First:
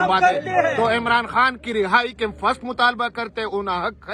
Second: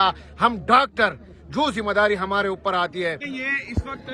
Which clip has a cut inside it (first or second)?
second